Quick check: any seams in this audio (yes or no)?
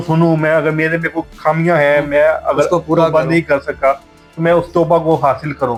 no